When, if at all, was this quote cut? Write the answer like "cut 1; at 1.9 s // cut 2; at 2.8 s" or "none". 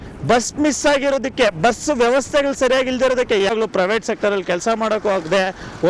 cut 1; at 3.5 s

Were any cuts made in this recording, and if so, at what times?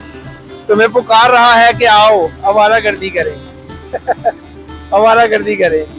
none

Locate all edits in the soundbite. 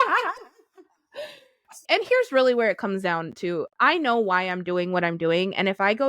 cut 1; at 1.7 s // cut 2; at 3.7 s

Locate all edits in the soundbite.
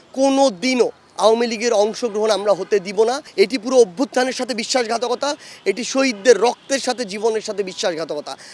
none

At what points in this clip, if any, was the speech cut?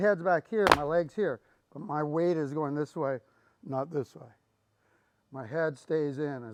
none

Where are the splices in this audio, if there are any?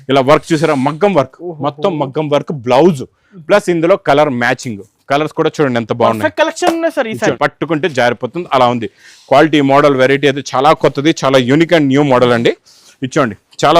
cut 1; at 7.4 s

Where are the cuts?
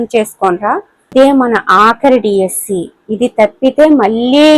cut 1; at 1.0 s

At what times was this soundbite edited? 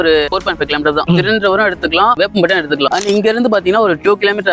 cut 1; at 1.0 s // cut 2; at 2.9 s

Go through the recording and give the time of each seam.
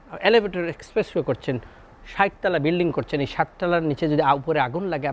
none

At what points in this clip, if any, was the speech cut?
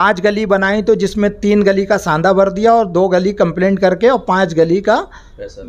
none

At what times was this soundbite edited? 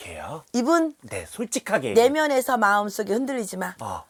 none

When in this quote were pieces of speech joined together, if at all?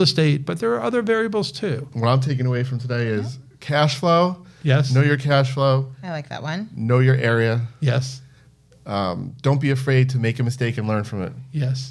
cut 1; at 1.9 s

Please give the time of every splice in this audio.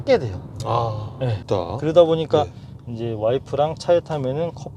cut 1; at 1.4 s

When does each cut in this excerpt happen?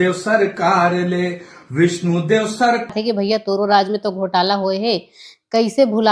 cut 1; at 2.9 s

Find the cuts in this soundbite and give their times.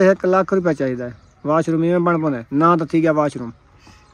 cut 1; at 2.4 s

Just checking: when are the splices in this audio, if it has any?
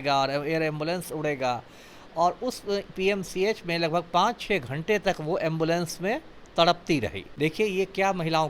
cut 1; at 7.2 s

